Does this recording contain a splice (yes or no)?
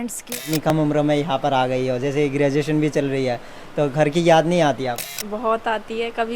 yes